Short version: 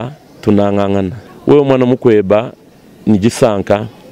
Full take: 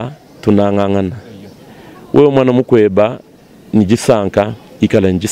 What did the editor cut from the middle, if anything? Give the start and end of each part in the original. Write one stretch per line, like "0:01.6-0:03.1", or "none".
0:01.2-0:01.9